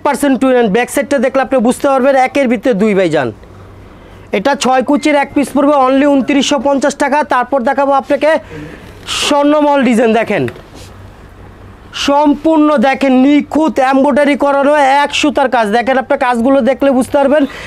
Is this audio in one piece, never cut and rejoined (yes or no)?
yes